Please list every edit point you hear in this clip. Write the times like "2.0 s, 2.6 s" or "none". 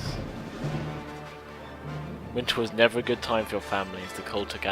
3.2 s